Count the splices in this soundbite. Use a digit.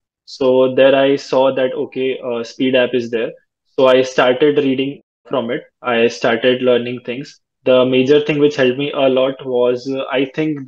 0